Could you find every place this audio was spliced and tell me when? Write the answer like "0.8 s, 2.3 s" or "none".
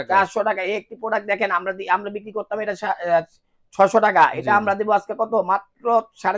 none